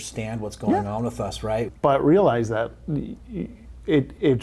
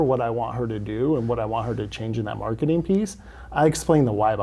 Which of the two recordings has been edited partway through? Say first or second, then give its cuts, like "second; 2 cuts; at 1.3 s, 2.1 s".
first; 1 cut; at 1.7 s